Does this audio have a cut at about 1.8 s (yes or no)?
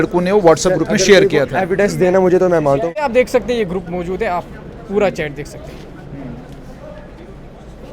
no